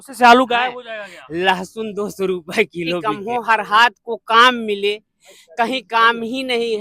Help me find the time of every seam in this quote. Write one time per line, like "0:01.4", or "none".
0:03.0

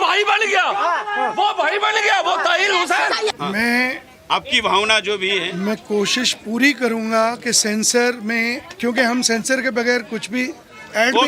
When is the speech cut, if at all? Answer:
0:03.3

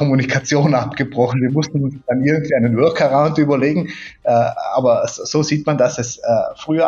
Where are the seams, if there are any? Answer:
none

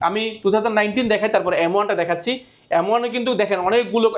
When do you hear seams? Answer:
none

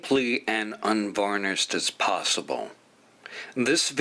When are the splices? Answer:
0:03.0

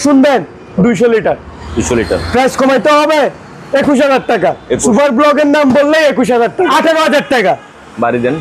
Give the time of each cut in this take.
0:06.7

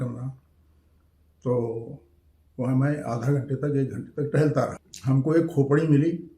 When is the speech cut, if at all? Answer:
0:04.9

